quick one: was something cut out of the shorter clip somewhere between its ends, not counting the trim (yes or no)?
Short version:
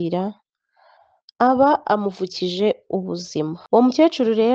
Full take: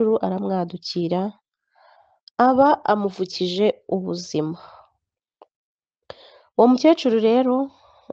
yes